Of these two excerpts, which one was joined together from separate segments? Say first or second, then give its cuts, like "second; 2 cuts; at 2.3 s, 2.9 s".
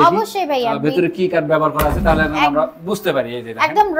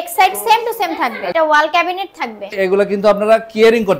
second; 2 cuts; at 1.2 s, 2.6 s